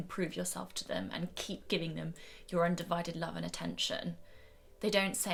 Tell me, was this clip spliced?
no; 0 cuts

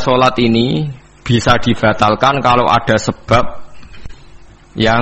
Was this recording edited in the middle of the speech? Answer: no; 0 cuts

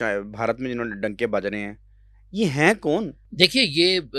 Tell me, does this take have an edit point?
no; 0 cuts

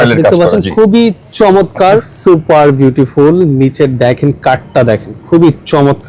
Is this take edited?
yes; 1 cut; at 2.1 s

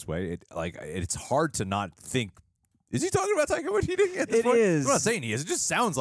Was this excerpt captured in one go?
yes; 0 cuts

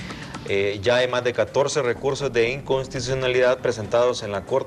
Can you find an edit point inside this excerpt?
no; 0 cuts

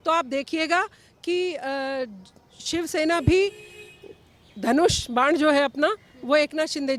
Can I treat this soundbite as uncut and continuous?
yes; 0 cuts

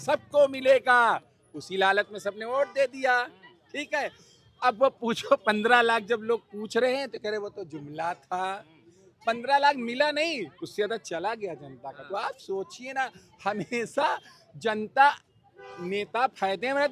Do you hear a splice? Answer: no; 0 cuts

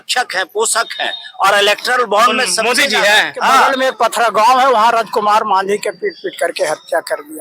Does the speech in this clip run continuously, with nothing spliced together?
no; 1 cut; at 3.7 s

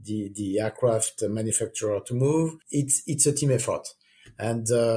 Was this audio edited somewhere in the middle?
no; 0 cuts

